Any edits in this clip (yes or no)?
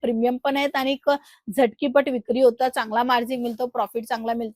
no